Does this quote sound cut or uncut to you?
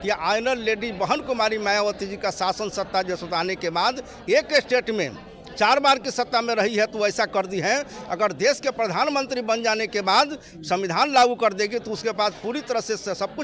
uncut